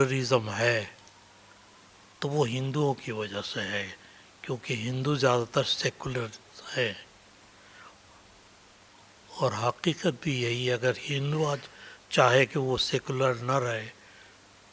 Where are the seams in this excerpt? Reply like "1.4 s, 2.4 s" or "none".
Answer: none